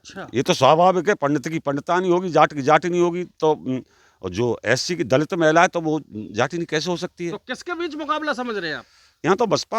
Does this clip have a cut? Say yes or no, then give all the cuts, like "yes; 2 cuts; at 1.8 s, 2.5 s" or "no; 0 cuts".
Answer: no; 0 cuts